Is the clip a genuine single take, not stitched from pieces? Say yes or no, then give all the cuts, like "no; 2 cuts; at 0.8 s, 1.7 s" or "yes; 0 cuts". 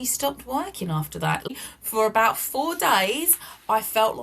no; 1 cut; at 1.5 s